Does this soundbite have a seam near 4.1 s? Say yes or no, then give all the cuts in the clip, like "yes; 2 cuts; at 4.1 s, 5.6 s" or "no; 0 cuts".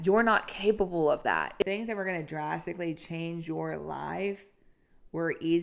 no; 1 cut; at 1.6 s